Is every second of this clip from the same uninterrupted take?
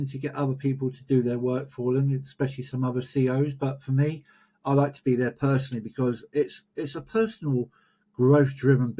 yes; 0 cuts

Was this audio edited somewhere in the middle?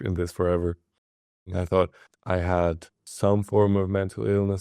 yes; 3 cuts; at 1.5 s, 2.1 s, 3.0 s

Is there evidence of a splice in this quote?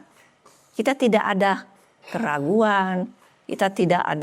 no; 0 cuts

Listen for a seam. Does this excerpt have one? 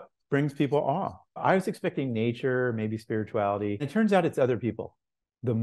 yes; 2 cuts; at 1.3 s, 3.9 s

